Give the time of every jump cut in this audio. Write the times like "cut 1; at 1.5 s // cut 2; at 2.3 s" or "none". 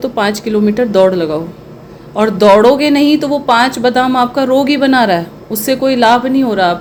none